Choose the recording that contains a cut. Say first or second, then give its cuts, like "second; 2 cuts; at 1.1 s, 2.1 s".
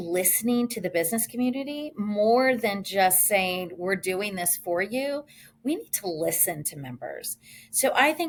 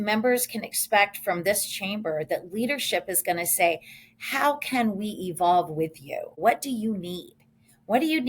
second; 1 cut; at 6.4 s